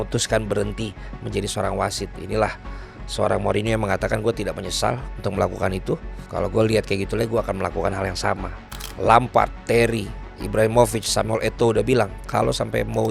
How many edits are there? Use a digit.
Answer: 1